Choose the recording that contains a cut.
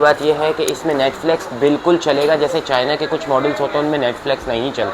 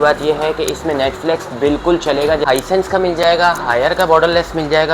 second; 1 cut; at 2.4 s

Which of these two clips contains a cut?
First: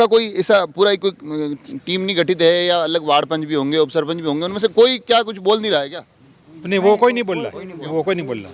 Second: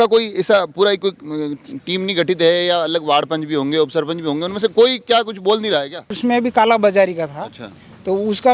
second; 1 cut; at 6.1 s

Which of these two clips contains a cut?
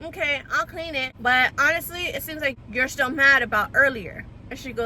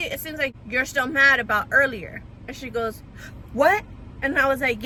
first; 1 cut; at 1.1 s

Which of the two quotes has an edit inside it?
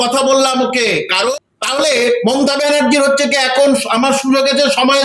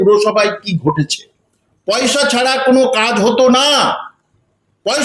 first; 1 cut; at 1.3 s

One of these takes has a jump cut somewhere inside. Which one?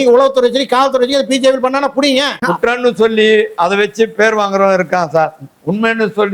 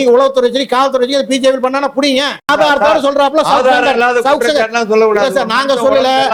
first; 1 cut; at 2.3 s

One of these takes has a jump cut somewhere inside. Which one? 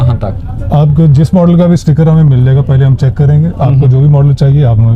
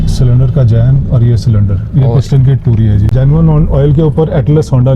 second; 1 cut; at 3.1 s

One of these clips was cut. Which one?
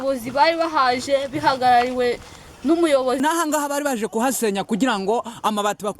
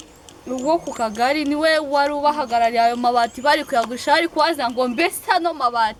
first; 1 cut; at 3.2 s

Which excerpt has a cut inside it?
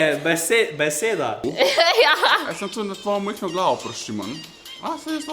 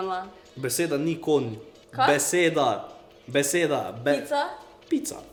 first; 1 cut; at 1.4 s

